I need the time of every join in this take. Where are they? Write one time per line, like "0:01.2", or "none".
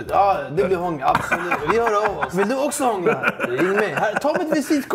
0:01.6
0:02.3